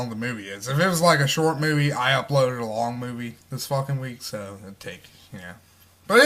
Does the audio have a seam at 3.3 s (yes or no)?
no